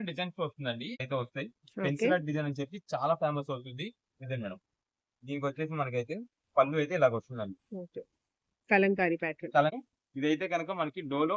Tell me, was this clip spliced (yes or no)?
yes